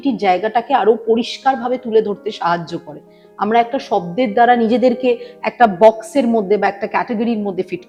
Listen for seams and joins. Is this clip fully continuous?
yes; 0 cuts

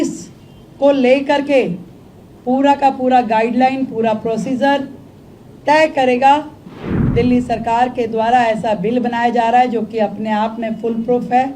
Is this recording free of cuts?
no; 1 cut; at 6.7 s

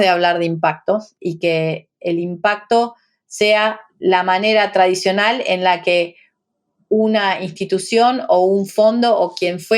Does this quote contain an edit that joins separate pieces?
yes; 2 cuts; at 1.1 s, 3.9 s

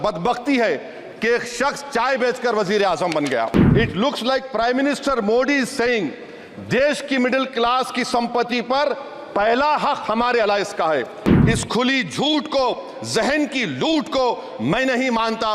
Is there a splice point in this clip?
yes; 2 cuts; at 3.6 s, 11.3 s

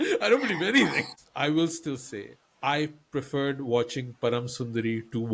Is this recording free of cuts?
no; 1 cut; at 1.1 s

